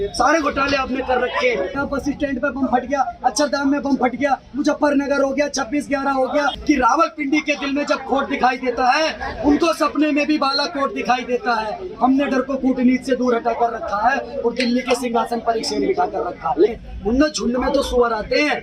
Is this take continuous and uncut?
no; 3 cuts; at 1.8 s, 6.6 s, 16.9 s

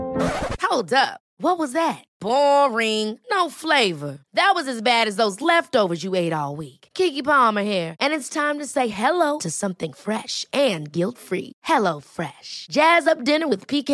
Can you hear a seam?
no; 0 cuts

